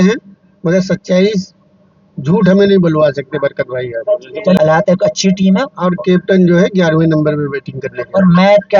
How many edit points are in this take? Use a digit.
1